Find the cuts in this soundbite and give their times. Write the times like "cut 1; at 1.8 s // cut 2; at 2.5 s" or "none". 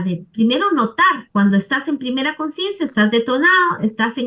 cut 1; at 1.2 s